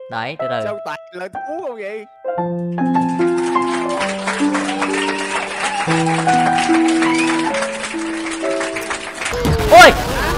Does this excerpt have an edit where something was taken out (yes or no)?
yes